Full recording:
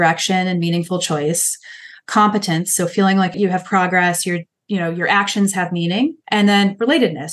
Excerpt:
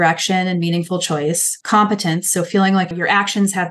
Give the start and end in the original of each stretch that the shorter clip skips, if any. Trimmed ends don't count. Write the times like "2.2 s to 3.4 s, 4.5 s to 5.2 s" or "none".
1.5 s to 1.9 s, 3.3 s to 4.9 s